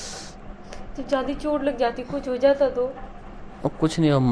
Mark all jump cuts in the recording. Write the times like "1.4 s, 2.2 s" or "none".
none